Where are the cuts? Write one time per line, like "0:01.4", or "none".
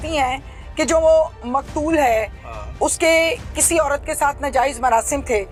none